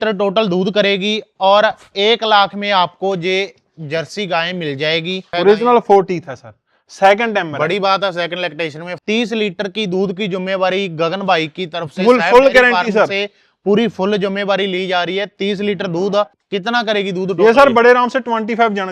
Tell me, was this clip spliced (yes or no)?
yes